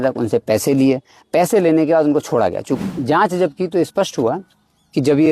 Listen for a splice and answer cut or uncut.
cut